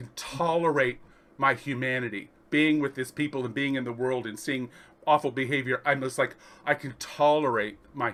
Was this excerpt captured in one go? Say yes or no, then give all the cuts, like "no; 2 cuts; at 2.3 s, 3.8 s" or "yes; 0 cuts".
yes; 0 cuts